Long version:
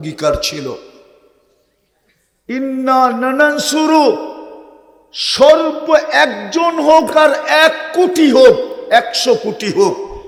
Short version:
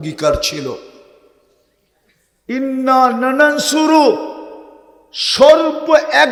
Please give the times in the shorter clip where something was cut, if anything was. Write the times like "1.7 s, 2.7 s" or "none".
none

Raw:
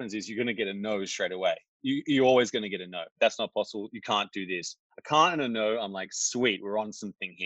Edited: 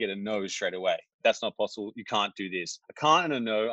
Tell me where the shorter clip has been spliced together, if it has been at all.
1.1 s, 2.8 s

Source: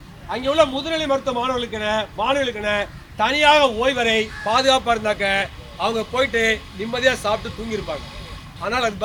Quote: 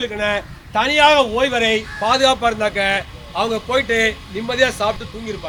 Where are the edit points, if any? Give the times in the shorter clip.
none

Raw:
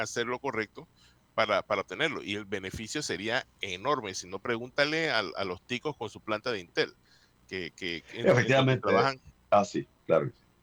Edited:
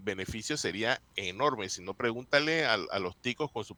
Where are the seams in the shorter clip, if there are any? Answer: none

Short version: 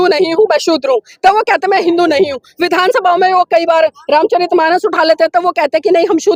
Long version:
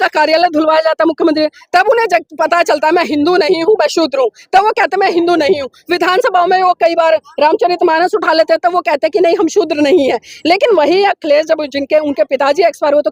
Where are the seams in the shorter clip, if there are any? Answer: none

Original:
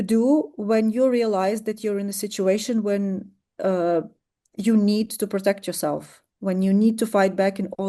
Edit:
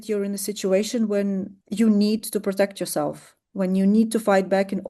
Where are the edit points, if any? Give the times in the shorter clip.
1.6 s

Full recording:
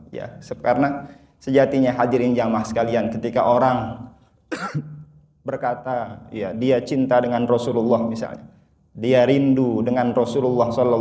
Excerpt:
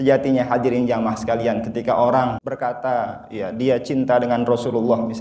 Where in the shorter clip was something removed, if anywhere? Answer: 2.4 s

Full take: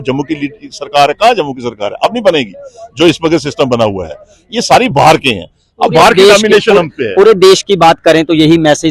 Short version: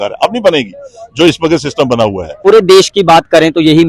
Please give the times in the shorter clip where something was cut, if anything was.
2.3 s

